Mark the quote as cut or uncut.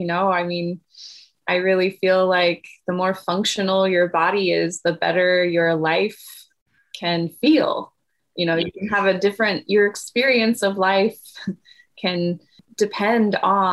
cut